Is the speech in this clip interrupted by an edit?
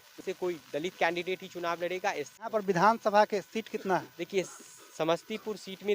yes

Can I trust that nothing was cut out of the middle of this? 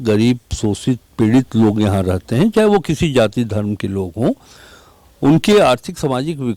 yes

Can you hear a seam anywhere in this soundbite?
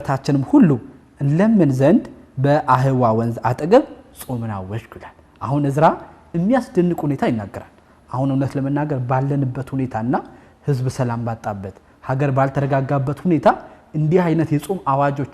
no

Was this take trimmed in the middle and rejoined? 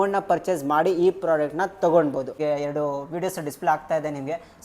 yes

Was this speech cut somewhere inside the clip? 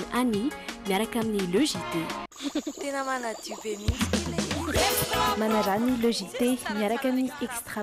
no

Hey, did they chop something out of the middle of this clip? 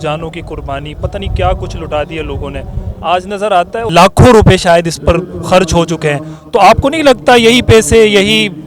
yes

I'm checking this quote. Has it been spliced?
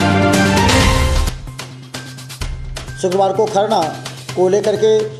no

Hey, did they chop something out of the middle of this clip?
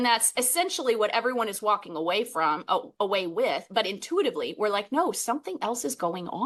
no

